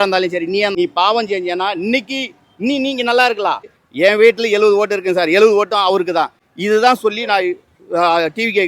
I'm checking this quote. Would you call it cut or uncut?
cut